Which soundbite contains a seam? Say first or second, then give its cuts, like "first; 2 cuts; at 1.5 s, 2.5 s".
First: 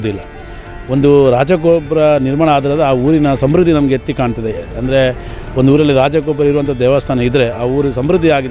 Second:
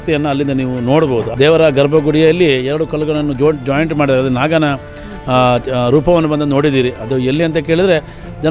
second; 1 cut; at 1.3 s